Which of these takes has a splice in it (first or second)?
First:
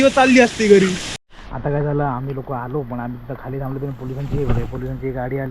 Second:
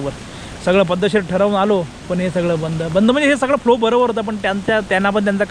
first